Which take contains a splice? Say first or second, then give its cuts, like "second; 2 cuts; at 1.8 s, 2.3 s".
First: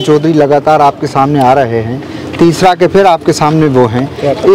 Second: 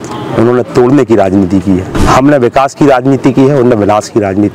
second; 1 cut; at 2.0 s